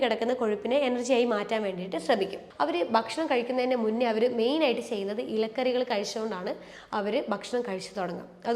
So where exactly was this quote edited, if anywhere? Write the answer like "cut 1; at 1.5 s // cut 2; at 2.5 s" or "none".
cut 1; at 2.4 s